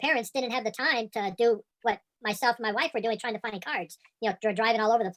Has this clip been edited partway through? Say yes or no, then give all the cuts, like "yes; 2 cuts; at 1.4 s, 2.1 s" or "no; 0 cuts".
no; 0 cuts